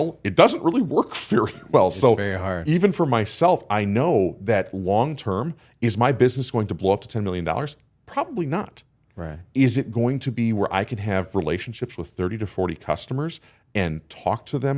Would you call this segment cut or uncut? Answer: uncut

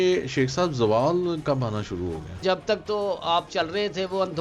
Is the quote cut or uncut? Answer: cut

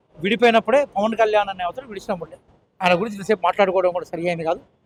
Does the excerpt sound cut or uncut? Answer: uncut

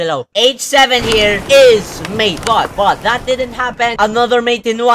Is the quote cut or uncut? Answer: cut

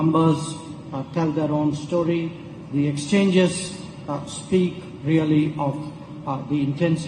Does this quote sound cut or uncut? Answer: uncut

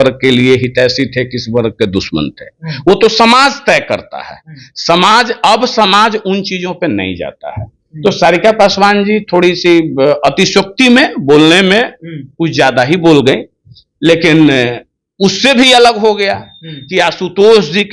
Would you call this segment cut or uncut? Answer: uncut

